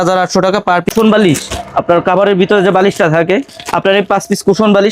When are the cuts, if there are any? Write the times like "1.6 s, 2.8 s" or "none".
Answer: 0.9 s